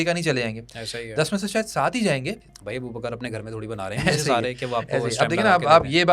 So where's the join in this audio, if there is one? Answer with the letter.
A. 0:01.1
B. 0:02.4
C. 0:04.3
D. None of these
B